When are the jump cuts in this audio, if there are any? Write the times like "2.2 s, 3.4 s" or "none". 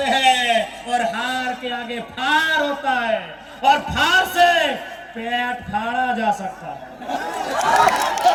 none